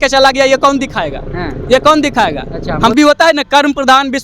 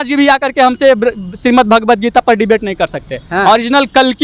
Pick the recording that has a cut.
first; 1 cut; at 2.9 s

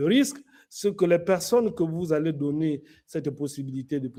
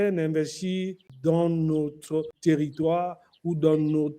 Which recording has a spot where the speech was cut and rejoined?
second; 2 cuts; at 1.0 s, 2.3 s

